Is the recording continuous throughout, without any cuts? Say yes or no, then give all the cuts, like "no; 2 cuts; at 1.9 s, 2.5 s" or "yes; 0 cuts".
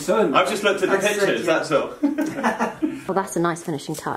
no; 1 cut; at 3.0 s